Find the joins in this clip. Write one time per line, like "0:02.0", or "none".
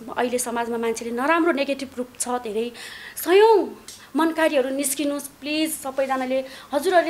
0:02.9